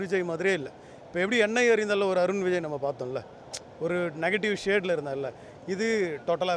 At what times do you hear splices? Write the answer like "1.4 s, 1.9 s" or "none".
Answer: none